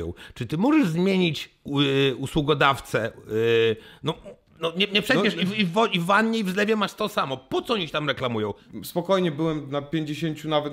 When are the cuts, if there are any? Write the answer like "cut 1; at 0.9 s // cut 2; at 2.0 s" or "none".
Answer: cut 1; at 8.6 s